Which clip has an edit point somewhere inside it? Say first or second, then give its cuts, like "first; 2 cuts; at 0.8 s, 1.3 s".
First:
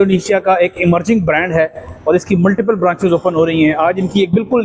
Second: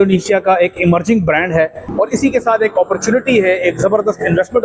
second; 1 cut; at 1.8 s